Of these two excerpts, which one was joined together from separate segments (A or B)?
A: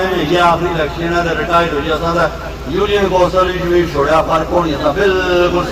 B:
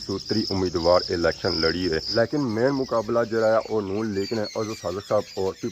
B